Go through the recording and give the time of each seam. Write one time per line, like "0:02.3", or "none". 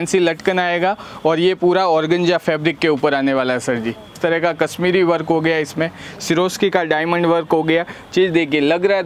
0:04.2